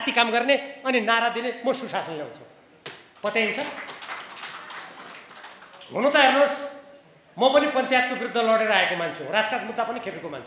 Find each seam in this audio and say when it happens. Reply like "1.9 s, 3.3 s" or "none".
none